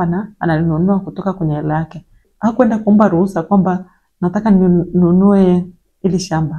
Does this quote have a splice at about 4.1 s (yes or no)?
no